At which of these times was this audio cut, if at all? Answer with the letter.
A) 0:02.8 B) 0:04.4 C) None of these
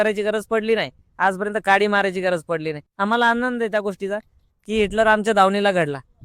A